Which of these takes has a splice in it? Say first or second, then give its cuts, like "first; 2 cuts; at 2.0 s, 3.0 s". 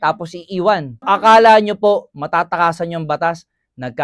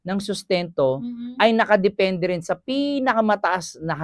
first; 1 cut; at 1.0 s